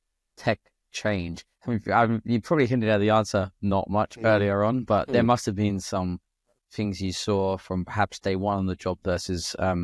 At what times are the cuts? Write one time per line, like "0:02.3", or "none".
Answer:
none

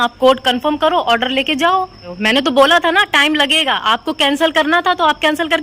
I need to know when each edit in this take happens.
0:02.0

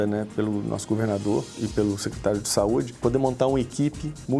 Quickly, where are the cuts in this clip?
0:01.5
0:02.9

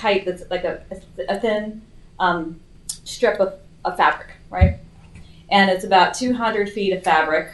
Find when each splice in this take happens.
none

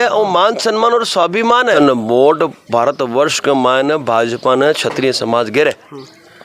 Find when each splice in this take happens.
0:01.8

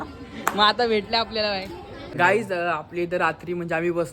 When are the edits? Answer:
0:02.1

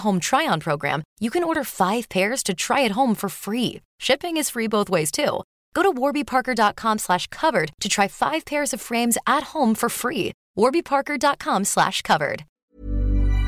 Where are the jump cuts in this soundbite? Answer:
0:12.5

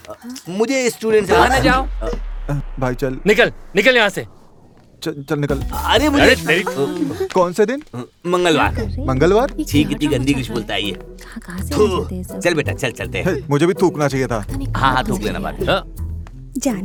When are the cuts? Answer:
none

